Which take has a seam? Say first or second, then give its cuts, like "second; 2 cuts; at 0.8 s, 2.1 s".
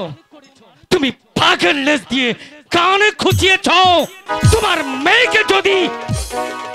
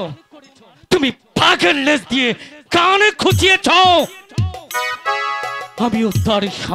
first; 1 cut; at 4.2 s